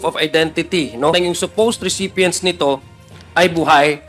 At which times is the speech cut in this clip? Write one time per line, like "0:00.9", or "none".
0:01.1